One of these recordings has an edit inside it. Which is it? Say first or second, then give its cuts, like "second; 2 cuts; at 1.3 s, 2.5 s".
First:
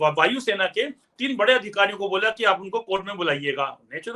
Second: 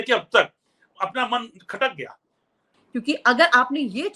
second; 1 cut; at 2.7 s